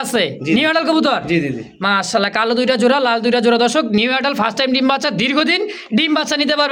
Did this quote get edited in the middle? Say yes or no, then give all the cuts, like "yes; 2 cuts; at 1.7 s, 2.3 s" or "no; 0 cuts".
no; 0 cuts